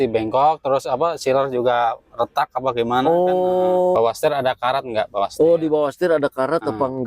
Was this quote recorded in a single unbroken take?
no; 1 cut; at 4.0 s

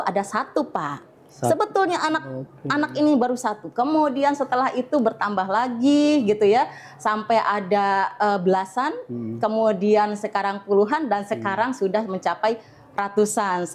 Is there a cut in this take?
no; 0 cuts

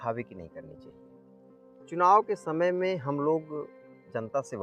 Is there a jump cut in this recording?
no; 0 cuts

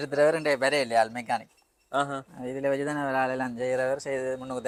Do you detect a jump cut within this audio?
no; 0 cuts

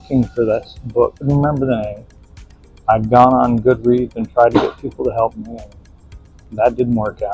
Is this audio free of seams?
no; 1 cut; at 1.3 s

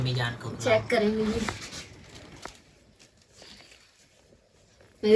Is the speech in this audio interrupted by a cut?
no; 0 cuts

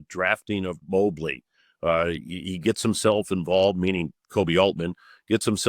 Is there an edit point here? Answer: no; 0 cuts

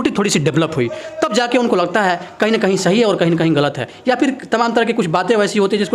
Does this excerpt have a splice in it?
no; 0 cuts

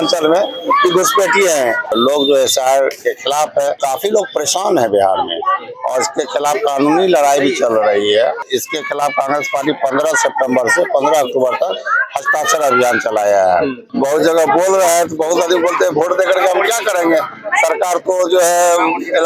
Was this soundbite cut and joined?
yes; 4 cuts; at 1.9 s, 3.8 s, 8.4 s, 13.8 s

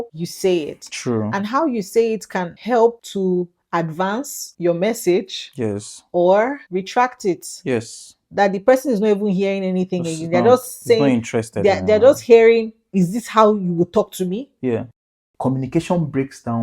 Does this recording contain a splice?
yes; 1 cut; at 15.3 s

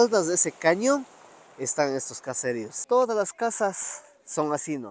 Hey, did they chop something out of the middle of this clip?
yes; 1 cut; at 2.8 s

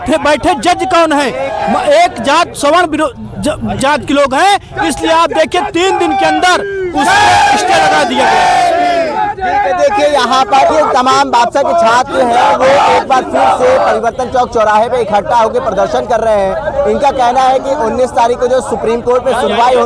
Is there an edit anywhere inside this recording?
no; 0 cuts

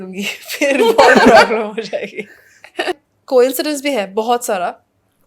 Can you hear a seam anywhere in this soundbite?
yes; 1 cut; at 3.0 s

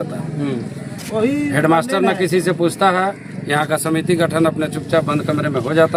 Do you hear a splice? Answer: no; 0 cuts

